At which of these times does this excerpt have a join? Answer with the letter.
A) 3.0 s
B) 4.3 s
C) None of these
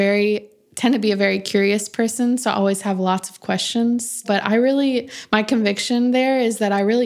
B